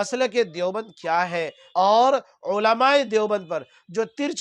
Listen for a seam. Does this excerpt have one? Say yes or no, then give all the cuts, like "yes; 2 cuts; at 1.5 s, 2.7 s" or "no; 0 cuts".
yes; 1 cut; at 1.6 s